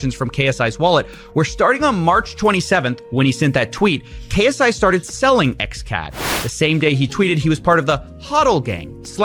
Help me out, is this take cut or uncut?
uncut